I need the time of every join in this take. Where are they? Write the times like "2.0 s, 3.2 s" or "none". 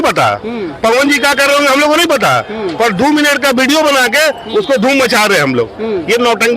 none